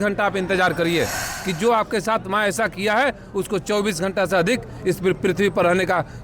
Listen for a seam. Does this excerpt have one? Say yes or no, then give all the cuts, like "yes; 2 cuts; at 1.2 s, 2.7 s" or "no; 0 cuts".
yes; 1 cut; at 1.2 s